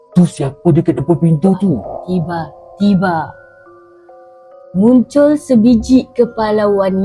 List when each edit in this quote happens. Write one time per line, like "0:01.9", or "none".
0:01.9